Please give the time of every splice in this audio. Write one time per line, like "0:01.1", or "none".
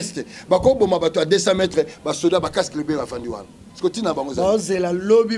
none